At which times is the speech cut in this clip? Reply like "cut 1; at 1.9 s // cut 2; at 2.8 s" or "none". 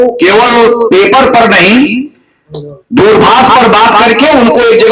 none